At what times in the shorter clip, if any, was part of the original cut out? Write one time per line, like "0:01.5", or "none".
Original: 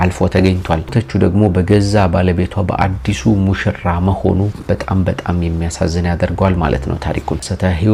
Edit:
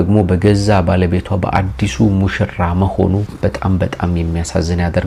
none